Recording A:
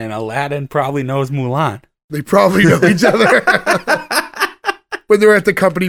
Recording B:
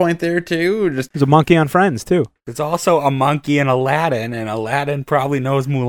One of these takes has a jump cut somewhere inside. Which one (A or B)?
B